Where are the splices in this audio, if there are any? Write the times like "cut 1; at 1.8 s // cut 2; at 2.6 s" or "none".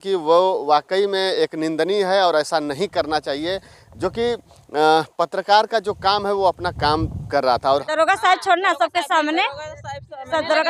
cut 1; at 7.8 s